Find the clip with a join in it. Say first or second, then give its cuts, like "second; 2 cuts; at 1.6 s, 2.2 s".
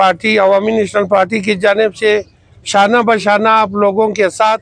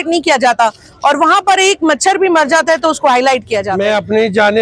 second; 1 cut; at 3.7 s